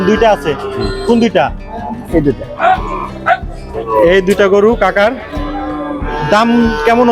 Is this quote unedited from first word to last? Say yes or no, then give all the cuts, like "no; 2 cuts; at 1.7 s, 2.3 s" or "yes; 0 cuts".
yes; 0 cuts